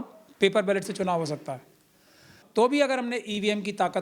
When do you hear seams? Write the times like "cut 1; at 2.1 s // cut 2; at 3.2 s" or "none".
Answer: cut 1; at 2.4 s